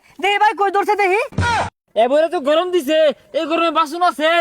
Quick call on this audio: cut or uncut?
cut